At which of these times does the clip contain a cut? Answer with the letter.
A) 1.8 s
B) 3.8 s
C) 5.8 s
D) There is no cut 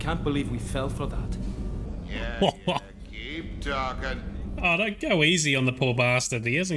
A